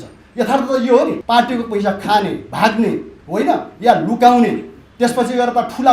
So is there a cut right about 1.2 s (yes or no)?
yes